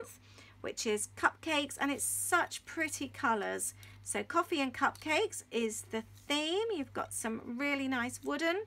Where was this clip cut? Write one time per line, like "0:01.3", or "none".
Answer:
0:05.4